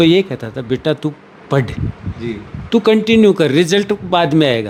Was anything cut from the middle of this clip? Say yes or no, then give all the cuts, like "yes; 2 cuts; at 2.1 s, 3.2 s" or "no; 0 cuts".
no; 0 cuts